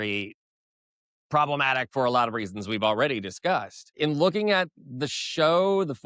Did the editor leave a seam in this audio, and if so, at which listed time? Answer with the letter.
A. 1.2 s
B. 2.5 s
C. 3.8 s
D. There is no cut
D